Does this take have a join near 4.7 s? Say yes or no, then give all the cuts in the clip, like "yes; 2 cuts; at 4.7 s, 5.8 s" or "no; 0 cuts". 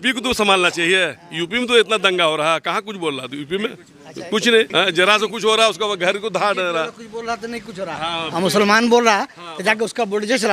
yes; 1 cut; at 4.7 s